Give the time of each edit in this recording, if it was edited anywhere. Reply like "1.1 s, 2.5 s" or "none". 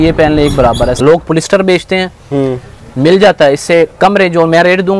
1.0 s